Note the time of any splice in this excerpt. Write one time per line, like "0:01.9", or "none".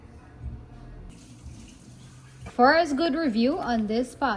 0:01.1
0:02.4